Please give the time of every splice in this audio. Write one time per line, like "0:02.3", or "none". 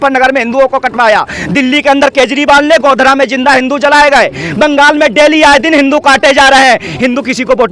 none